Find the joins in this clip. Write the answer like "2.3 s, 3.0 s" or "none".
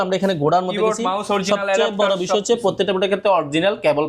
none

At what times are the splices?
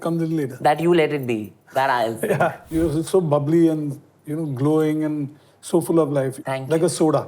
2.6 s, 6.3 s

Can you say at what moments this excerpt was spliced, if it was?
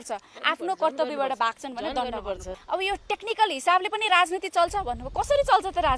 2.6 s

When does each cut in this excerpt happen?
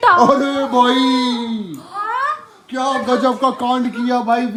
none

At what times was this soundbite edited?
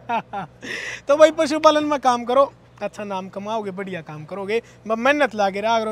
none

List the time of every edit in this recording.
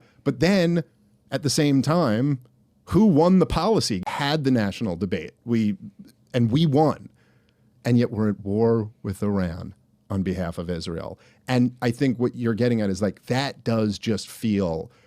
4.0 s

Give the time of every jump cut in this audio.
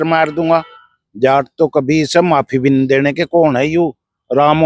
1.0 s

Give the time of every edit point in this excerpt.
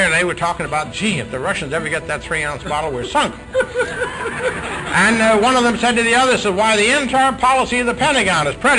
none

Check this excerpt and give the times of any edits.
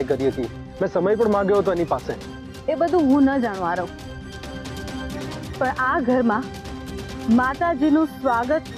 3.9 s, 5.6 s

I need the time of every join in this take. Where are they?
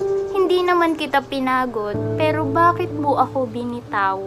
none

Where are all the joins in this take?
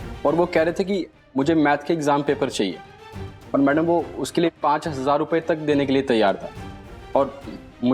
none

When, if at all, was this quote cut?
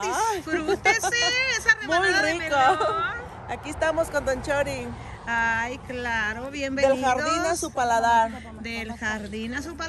none

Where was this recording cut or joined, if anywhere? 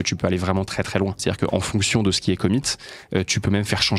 1.2 s

